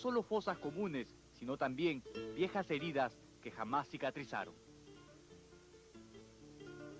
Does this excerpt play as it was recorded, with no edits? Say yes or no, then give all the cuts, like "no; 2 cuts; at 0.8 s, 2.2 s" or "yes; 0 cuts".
no; 1 cut; at 2.3 s